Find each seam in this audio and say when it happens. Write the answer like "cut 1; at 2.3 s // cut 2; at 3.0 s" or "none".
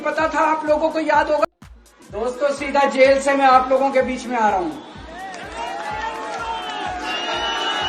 cut 1; at 1.4 s